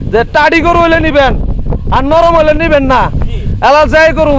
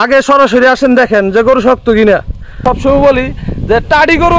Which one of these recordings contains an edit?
second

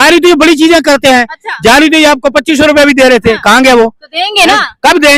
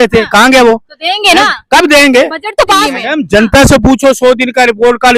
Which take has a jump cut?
second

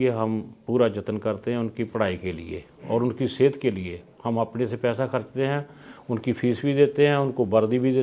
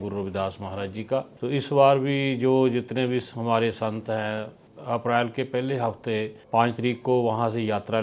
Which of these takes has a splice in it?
second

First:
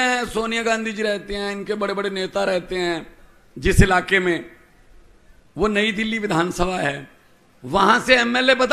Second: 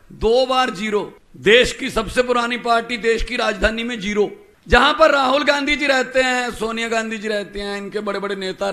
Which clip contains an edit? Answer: second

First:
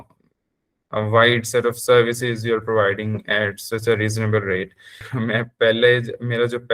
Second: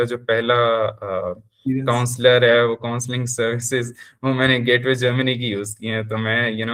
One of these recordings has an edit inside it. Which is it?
first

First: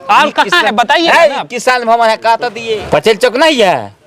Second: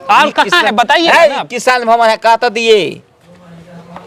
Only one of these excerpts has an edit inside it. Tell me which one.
first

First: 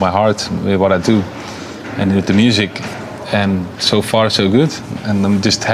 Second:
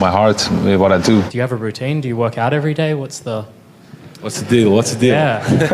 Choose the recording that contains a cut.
second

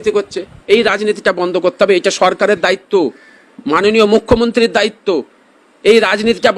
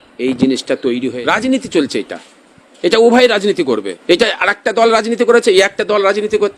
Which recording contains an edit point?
second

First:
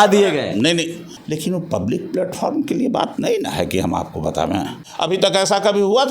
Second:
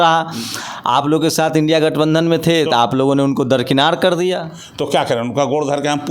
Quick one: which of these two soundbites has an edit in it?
first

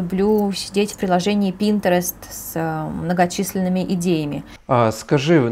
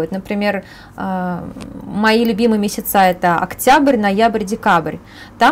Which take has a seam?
first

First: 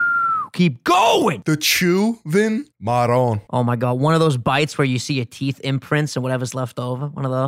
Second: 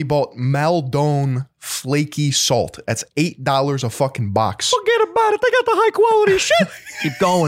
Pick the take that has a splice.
first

